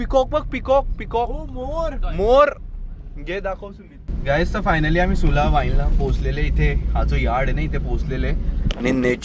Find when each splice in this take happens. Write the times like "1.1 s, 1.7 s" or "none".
4.2 s